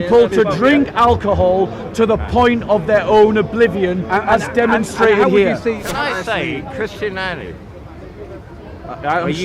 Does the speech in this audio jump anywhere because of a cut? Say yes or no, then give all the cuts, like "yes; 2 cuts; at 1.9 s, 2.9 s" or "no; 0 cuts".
yes; 1 cut; at 5.9 s